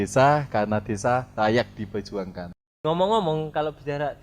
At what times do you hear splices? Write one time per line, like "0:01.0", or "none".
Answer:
0:02.8